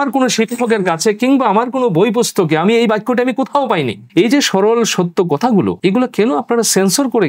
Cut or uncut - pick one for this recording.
cut